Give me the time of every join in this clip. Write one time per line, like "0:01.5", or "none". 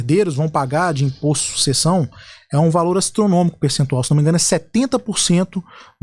none